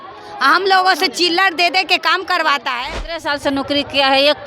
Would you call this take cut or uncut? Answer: cut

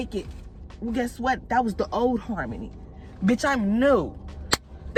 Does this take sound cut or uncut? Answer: uncut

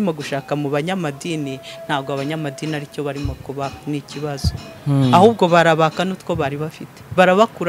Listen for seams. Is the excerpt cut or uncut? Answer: uncut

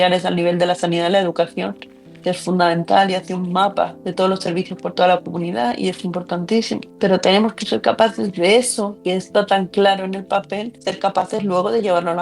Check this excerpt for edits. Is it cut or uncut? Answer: uncut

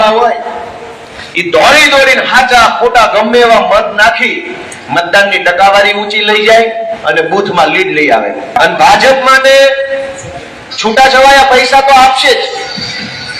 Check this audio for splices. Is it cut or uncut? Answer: cut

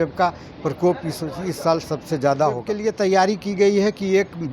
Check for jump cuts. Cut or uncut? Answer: cut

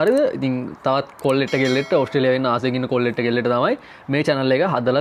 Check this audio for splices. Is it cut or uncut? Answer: uncut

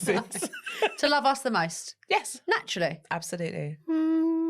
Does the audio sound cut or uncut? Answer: uncut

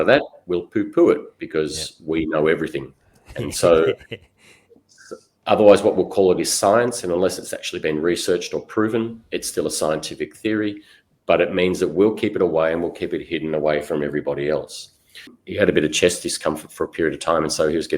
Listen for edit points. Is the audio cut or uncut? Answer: cut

